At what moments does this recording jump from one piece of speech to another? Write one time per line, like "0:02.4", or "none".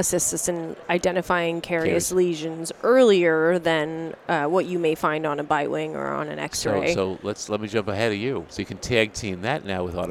0:08.6